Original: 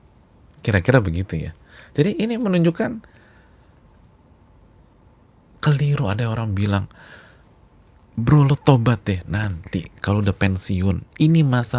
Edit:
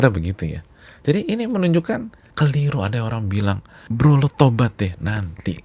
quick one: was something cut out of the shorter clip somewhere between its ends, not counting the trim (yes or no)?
yes